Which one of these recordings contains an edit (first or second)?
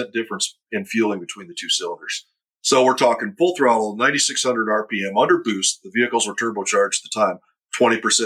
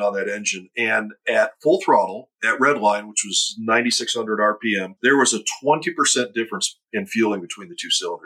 second